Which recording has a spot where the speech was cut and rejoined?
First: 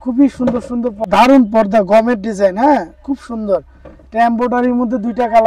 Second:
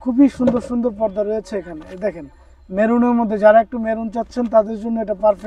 first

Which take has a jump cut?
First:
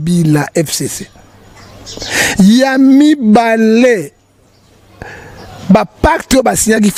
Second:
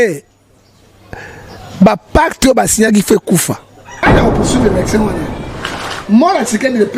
second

